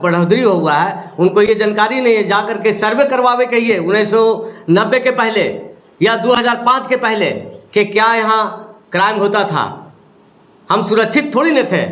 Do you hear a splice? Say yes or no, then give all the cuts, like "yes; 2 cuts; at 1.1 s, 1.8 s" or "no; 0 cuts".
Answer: no; 0 cuts